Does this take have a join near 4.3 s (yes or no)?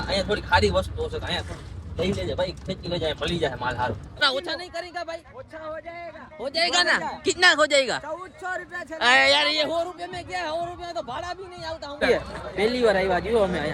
yes